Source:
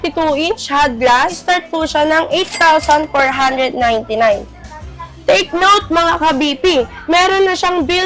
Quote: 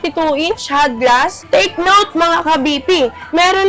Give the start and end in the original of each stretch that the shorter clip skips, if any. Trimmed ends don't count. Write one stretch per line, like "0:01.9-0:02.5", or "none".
0:01.4-0:05.1